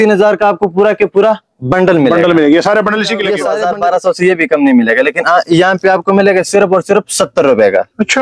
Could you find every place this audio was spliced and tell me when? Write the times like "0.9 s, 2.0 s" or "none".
3.4 s

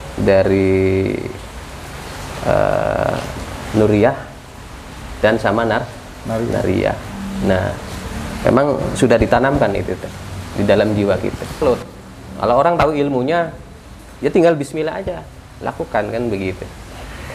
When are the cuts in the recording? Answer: 11.6 s

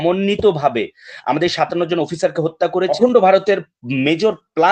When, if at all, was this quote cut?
2.9 s

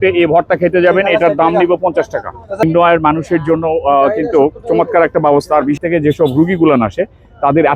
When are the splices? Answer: 2.6 s, 5.8 s

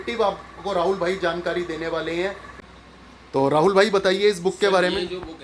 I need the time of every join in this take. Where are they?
2.4 s

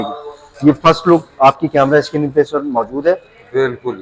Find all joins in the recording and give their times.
none

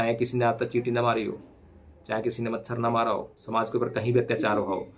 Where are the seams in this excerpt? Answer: 3.4 s

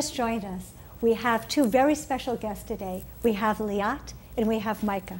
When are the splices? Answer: none

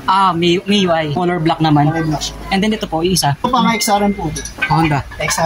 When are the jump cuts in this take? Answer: 1.2 s, 3.4 s

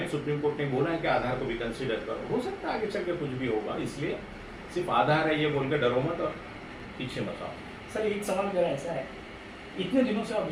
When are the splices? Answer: none

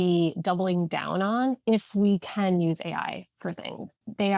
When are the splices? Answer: 3.4 s

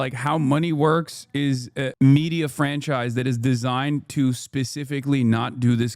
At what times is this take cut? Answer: 1.9 s

